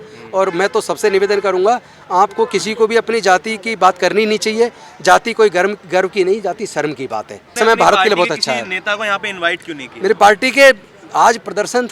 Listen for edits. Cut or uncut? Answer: cut